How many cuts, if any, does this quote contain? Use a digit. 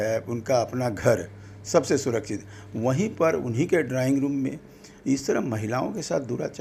0